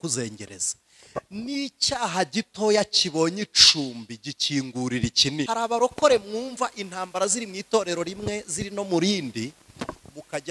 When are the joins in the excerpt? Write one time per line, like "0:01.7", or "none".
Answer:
0:05.5